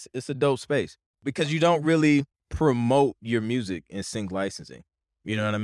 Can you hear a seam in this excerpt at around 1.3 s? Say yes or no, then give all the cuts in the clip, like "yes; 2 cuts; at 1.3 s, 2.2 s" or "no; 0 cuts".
yes; 2 cuts; at 1.3 s, 2.4 s